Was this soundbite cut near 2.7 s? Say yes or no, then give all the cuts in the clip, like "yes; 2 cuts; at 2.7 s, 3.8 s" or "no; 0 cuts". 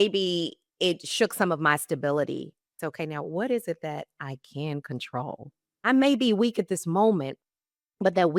yes; 2 cuts; at 2.7 s, 5.9 s